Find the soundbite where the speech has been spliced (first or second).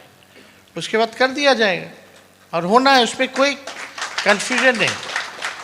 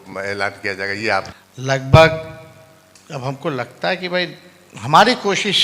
second